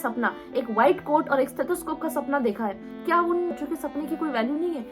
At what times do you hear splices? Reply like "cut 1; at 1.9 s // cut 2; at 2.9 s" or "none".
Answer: cut 1; at 3.6 s